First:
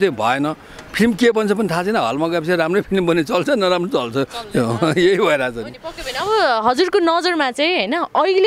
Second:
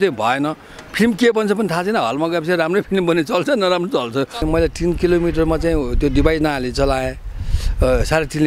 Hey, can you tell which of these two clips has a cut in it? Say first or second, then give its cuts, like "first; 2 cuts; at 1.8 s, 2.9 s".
second; 1 cut; at 4.4 s